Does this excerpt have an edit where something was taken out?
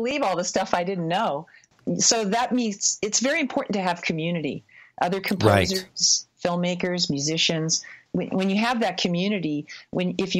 yes; 2 cuts; at 1.7 s, 8.0 s

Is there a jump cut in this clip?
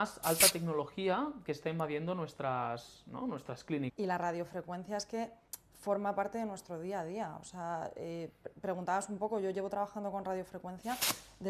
yes; 1 cut; at 3.9 s

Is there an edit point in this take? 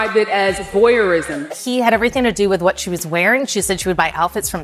yes; 1 cut; at 1.5 s

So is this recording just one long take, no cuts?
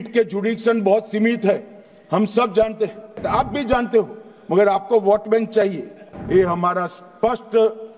no; 2 cuts; at 3.2 s, 6.1 s

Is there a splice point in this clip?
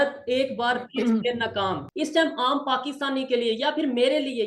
yes; 1 cut; at 1.9 s

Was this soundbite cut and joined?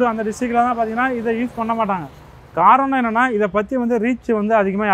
no; 0 cuts

